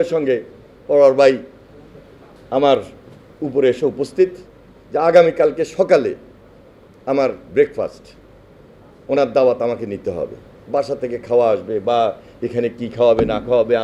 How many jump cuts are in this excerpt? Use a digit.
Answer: 0